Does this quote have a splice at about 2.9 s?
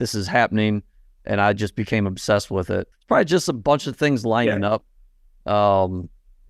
yes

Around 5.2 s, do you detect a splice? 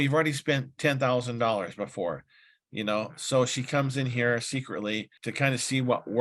yes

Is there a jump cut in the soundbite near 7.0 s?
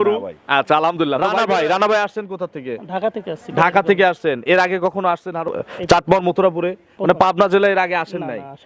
no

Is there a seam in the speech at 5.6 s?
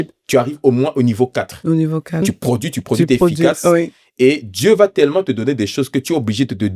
no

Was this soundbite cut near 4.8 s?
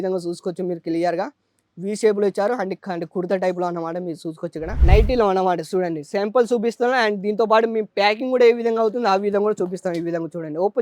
yes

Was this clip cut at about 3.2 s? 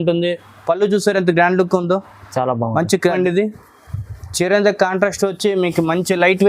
yes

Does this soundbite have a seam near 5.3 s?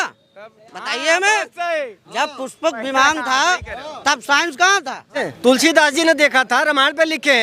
yes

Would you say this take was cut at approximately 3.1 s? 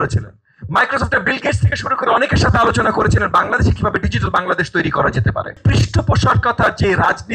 no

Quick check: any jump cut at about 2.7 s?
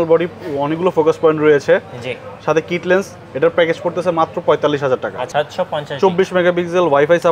no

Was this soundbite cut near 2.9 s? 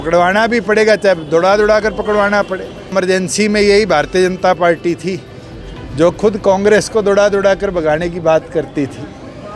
yes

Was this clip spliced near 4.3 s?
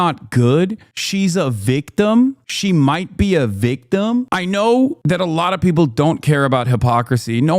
yes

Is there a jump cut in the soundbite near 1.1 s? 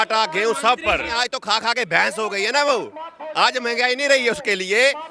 yes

